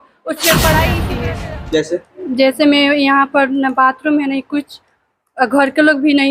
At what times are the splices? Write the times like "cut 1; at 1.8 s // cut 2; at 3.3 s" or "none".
cut 1; at 1.1 s

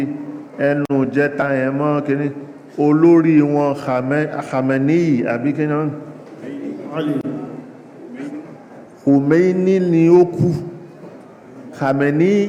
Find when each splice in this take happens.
none

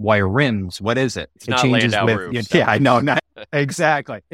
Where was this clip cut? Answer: cut 1; at 1.3 s // cut 2; at 2.4 s // cut 3; at 3.3 s

